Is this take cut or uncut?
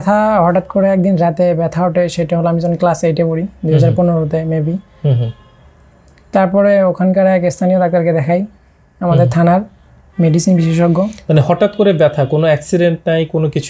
uncut